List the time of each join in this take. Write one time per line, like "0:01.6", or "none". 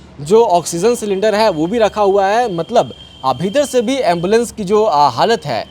none